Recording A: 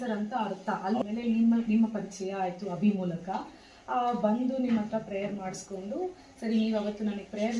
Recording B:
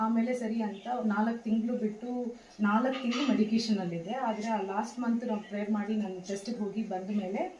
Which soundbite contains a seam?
A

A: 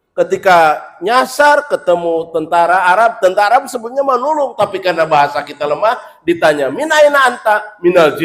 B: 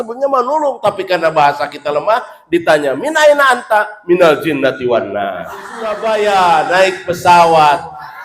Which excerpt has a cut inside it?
B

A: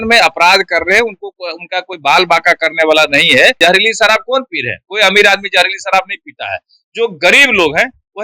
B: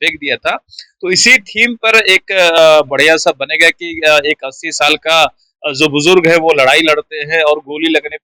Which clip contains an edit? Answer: A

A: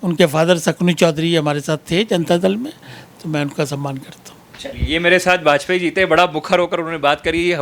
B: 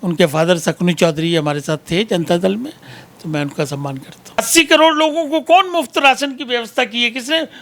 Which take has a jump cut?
B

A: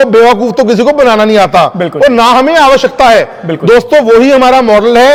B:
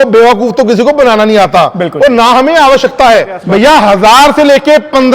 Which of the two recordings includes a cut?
B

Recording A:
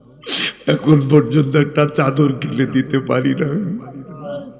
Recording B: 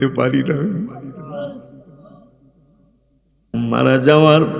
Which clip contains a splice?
B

